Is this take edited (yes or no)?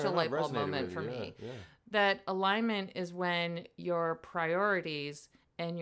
no